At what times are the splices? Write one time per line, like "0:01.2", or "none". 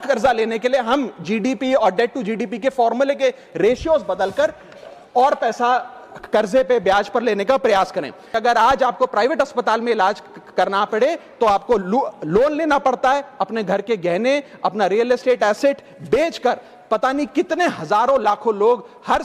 0:08.4